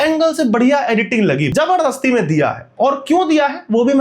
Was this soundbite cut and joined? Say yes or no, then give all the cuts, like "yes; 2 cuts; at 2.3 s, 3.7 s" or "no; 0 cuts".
yes; 1 cut; at 1.5 s